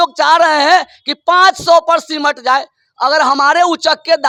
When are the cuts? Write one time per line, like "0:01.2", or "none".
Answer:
none